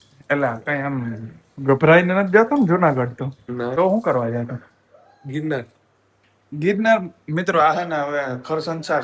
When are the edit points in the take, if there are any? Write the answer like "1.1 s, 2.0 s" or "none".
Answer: 3.7 s